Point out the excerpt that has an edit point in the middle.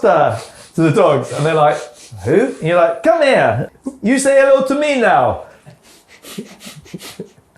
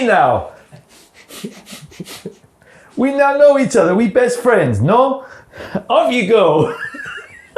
first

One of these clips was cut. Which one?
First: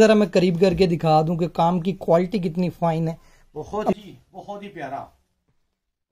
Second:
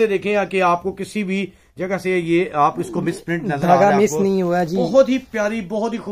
first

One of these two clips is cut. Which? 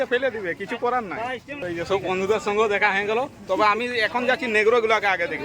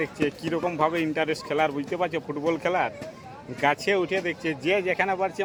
first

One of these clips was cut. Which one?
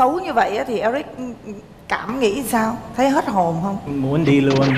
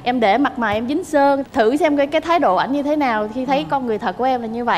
second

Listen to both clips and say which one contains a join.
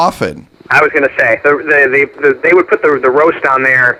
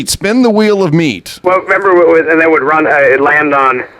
second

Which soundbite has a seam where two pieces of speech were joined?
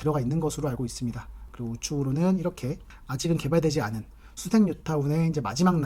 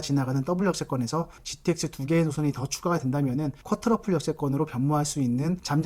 second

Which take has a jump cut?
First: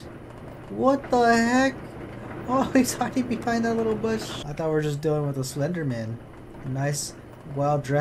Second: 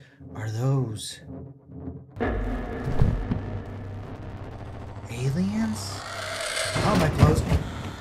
first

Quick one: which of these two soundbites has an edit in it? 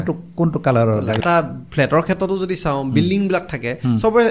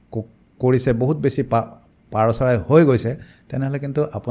first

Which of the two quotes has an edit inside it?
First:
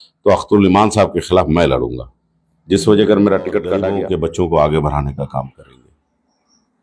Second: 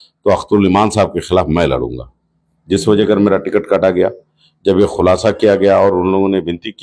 first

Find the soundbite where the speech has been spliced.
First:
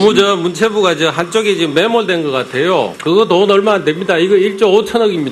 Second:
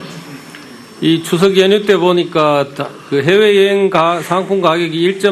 first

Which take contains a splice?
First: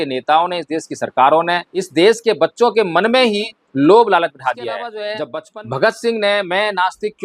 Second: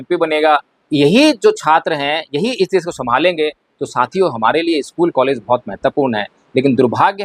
first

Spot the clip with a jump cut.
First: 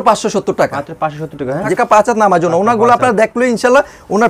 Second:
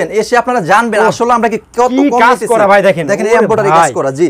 first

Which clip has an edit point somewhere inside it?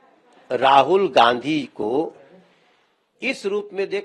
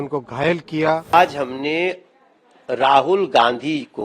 second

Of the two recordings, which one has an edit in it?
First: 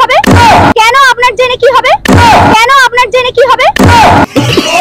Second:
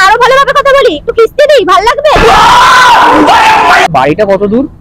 second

